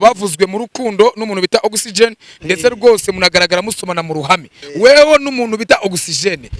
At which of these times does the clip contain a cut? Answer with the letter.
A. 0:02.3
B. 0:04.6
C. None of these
B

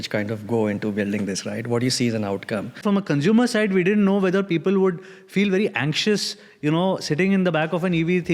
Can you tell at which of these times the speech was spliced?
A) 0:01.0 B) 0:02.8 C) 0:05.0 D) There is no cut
B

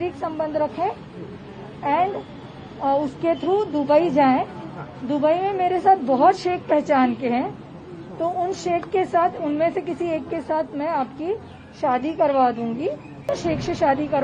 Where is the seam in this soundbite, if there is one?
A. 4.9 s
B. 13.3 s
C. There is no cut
B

